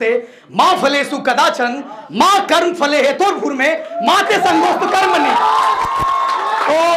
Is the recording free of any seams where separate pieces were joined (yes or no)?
yes